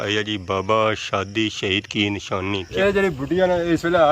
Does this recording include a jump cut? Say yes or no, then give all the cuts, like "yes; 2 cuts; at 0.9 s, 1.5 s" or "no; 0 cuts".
yes; 1 cut; at 2.7 s